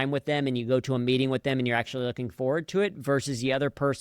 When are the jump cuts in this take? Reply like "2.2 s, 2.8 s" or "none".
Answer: none